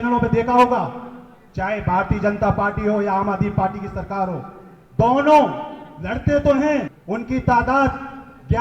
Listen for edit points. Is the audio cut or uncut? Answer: cut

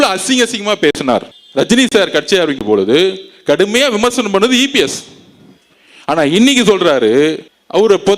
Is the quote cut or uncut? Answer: cut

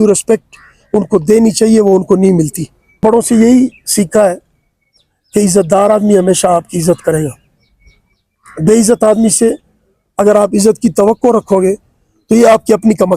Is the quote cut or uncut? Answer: cut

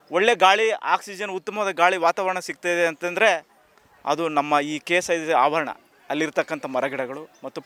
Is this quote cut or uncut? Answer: uncut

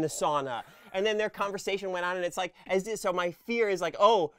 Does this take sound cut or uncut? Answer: uncut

